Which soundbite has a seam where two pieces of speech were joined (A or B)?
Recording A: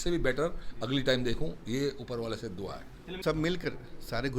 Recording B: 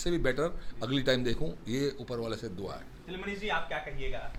A